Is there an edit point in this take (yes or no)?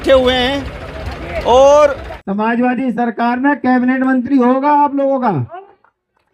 yes